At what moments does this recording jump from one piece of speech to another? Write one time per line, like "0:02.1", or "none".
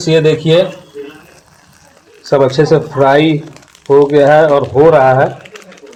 none